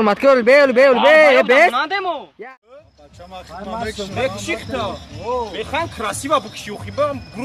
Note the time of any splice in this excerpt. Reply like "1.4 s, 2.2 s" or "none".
2.3 s